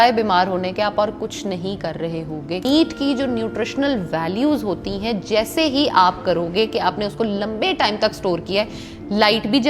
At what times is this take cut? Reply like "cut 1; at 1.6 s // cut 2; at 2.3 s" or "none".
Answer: cut 1; at 2.6 s